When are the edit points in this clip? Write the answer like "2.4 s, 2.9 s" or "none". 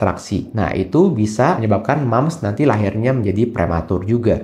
1.6 s